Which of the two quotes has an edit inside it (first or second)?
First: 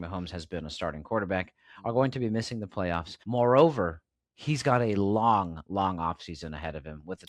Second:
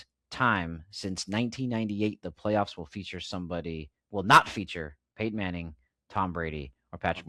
first